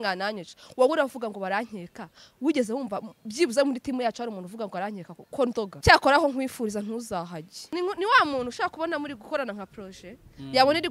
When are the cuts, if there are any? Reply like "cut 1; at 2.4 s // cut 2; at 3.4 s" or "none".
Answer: cut 1; at 5.7 s // cut 2; at 7.7 s